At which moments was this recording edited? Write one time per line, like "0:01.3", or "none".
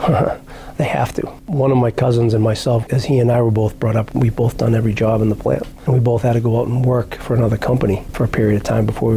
0:01.4
0:02.8
0:04.1
0:05.7